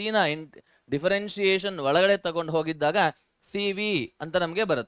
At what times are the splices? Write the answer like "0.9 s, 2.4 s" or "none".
none